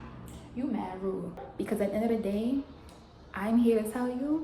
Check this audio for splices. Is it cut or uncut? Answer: cut